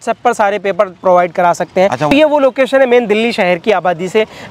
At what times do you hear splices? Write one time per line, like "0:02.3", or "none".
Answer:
0:02.1